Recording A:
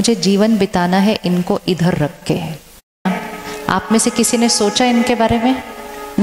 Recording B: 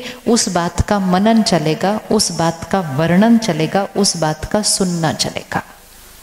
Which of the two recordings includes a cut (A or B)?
A